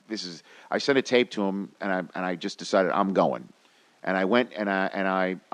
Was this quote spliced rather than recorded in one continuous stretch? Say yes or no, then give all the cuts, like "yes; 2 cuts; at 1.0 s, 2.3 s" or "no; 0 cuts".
no; 0 cuts